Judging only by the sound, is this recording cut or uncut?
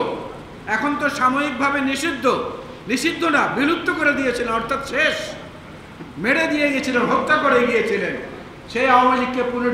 uncut